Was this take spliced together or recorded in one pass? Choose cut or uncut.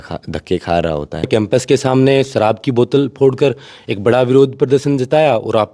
cut